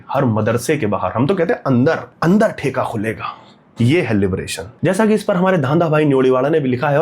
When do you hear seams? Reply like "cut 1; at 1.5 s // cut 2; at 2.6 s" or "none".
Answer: cut 1; at 2.1 s // cut 2; at 4.7 s